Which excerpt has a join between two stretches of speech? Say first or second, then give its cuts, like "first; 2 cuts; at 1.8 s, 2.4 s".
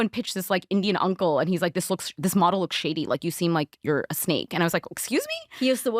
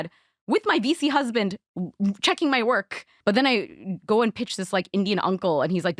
second; 1 cut; at 3.0 s